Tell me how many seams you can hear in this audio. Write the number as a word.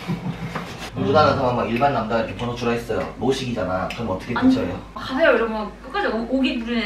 one